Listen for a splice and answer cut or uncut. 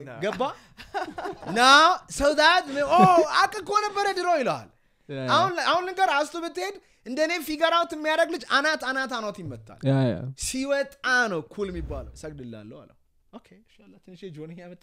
cut